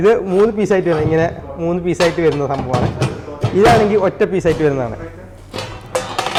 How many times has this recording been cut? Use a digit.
0